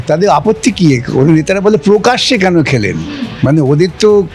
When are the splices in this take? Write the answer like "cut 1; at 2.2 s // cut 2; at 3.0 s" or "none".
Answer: cut 1; at 3.2 s